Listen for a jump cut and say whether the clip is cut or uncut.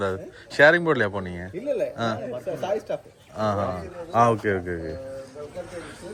uncut